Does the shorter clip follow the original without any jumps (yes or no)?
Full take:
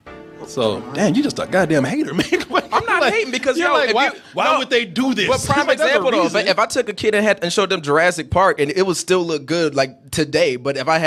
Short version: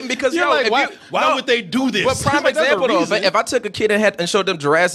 yes